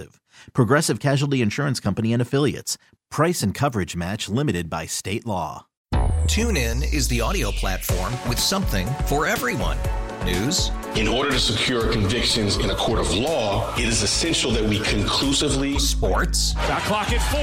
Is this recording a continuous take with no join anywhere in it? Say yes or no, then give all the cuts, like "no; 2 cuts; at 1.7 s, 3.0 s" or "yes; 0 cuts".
no; 1 cut; at 5.7 s